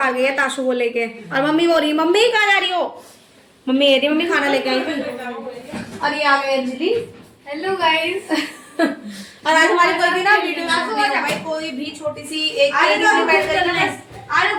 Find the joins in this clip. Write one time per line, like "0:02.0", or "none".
none